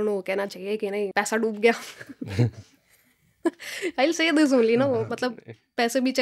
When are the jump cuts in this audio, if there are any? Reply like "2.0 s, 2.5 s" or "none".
1.1 s

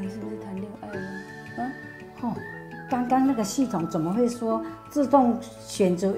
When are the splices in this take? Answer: none

